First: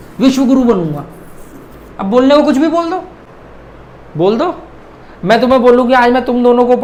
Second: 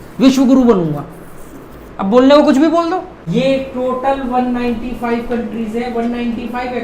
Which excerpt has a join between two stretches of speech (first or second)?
second